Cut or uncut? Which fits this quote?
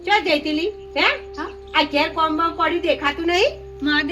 uncut